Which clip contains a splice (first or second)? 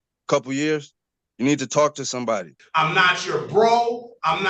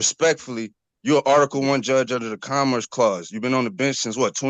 first